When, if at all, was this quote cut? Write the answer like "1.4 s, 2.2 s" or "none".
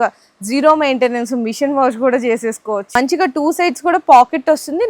2.9 s